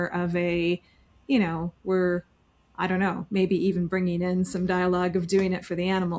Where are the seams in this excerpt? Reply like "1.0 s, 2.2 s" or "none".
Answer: none

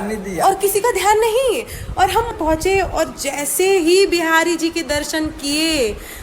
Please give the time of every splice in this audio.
2.3 s

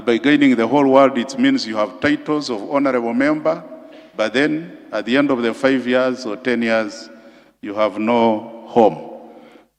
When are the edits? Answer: none

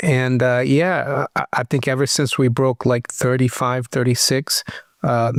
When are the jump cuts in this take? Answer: none

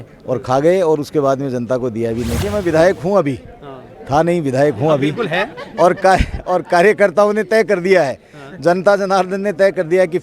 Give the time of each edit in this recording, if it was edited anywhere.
2.5 s

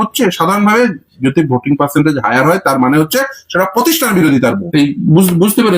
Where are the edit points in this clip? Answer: 4.6 s

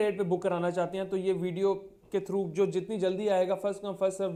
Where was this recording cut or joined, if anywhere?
none

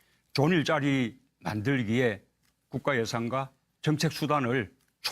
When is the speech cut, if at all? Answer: 4.1 s

